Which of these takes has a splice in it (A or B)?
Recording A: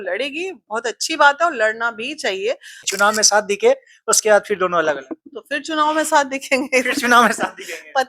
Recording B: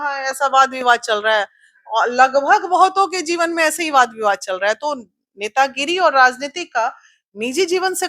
A